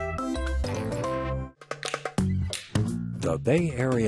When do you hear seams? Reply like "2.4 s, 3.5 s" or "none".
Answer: 1.6 s